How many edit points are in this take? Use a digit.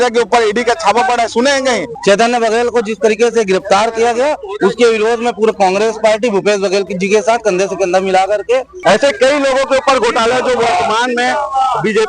2